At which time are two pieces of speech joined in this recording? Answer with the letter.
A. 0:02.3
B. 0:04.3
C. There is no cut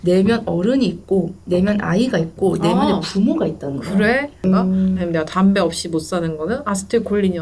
B